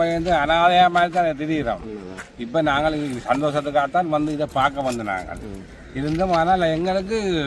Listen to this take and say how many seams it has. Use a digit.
0